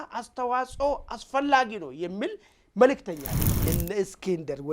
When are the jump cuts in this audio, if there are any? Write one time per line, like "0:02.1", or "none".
0:03.7